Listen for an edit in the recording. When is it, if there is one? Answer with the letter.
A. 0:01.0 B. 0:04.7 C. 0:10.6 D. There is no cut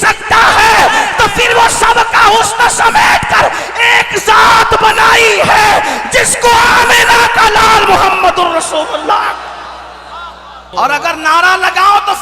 C